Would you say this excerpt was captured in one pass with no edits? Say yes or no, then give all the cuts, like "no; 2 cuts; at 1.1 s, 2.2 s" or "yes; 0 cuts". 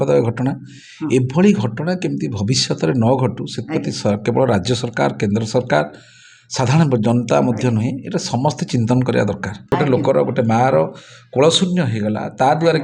no; 1 cut; at 9.6 s